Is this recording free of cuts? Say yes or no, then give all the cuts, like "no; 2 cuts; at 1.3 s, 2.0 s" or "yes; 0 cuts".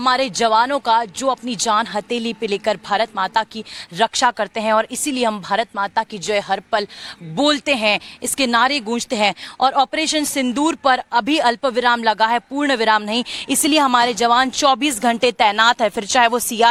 yes; 0 cuts